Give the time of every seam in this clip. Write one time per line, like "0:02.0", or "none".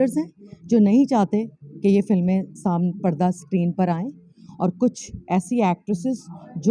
none